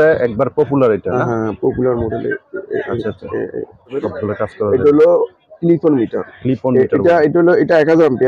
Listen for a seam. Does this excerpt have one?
yes; 1 cut; at 4.0 s

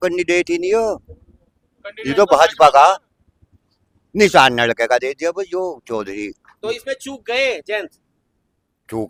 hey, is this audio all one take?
yes; 0 cuts

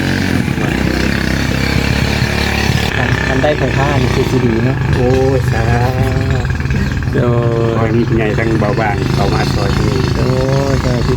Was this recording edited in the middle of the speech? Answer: yes; 1 cut; at 2.9 s

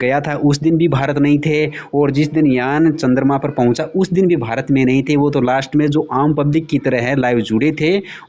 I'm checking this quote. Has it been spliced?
no; 0 cuts

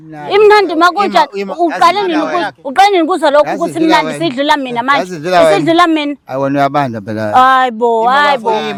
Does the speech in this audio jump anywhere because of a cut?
no; 0 cuts

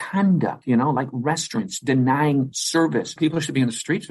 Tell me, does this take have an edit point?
yes; 1 cut; at 3.1 s

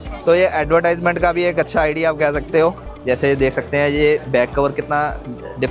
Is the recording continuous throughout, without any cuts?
no; 1 cut; at 2.9 s

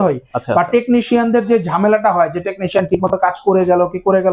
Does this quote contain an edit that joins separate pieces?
no; 0 cuts

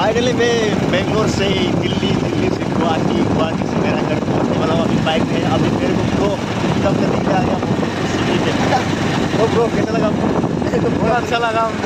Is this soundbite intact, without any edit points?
yes; 0 cuts

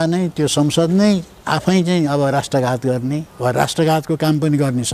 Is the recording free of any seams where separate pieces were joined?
no; 1 cut; at 3.3 s

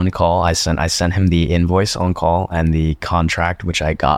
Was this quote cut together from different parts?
no; 0 cuts

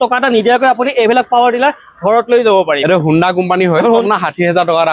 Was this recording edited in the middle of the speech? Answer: yes; 2 cuts; at 2.8 s, 4.0 s

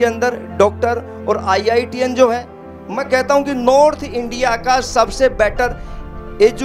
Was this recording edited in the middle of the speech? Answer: no; 0 cuts

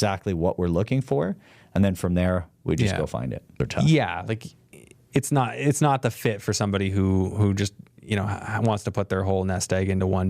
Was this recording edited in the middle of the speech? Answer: yes; 1 cut; at 3.6 s

